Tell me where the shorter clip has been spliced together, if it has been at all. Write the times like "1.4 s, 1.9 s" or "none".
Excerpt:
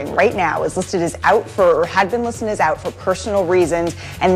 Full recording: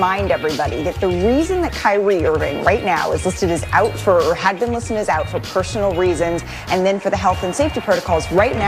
none